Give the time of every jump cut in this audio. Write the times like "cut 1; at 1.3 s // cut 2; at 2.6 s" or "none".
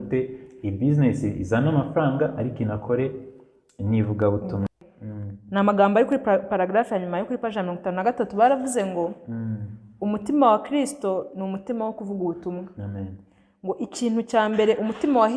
cut 1; at 4.8 s